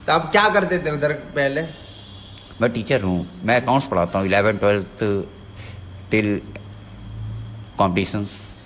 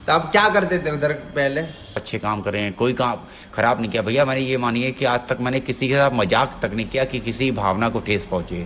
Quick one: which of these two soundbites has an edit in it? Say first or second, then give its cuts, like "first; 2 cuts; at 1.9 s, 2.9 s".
second; 1 cut; at 2.1 s